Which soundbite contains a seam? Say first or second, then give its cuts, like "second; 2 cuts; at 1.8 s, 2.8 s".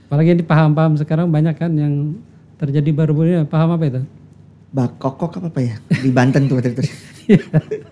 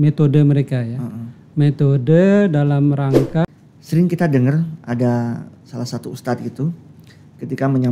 second; 1 cut; at 3.4 s